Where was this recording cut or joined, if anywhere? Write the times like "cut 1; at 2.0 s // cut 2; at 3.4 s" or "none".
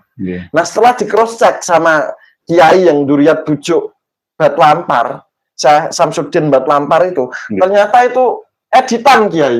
none